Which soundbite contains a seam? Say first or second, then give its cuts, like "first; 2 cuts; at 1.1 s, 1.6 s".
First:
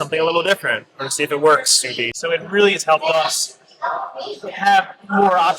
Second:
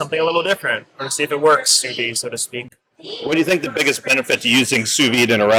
first; 1 cut; at 2.1 s